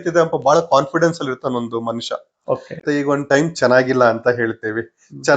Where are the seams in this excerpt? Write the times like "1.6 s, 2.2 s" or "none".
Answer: 2.8 s